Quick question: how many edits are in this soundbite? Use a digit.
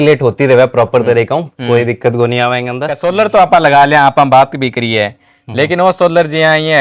1